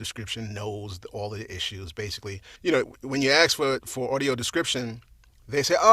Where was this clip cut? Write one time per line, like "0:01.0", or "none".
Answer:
0:02.7